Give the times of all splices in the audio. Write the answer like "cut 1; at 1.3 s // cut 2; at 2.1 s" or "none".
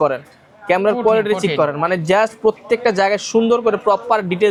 none

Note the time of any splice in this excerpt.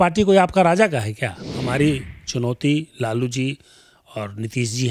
cut 1; at 1.5 s

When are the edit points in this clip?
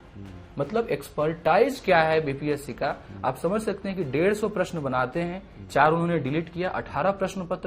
none

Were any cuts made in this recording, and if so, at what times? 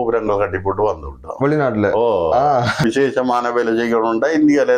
cut 1; at 2.8 s

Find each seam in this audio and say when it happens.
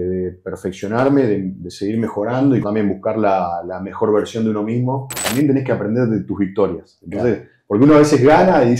cut 1; at 2.7 s // cut 2; at 5.2 s

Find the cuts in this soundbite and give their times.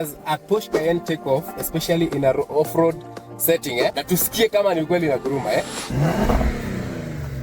cut 1; at 4.0 s // cut 2; at 5.8 s

